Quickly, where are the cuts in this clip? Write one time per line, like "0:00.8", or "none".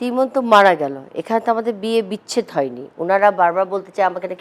none